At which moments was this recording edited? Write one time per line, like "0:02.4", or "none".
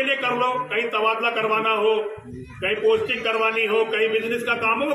none